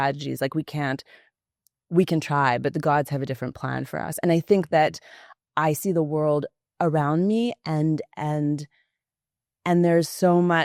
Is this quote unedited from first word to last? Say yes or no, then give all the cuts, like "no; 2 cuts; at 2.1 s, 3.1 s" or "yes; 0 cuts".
yes; 0 cuts